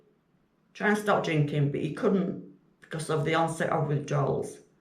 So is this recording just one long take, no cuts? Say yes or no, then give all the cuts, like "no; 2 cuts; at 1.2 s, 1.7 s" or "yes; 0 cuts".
yes; 0 cuts